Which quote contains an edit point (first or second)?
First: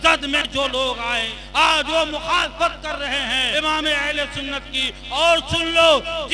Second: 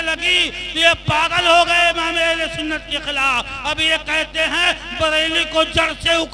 first